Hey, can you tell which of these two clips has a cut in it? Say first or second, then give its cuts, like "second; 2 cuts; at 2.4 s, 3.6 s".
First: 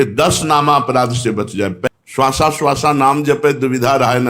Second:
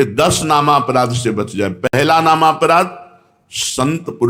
first; 1 cut; at 1.9 s